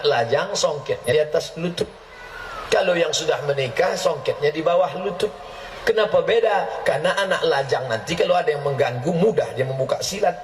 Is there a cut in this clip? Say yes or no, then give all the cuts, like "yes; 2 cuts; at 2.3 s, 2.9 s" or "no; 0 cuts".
yes; 1 cut; at 1.1 s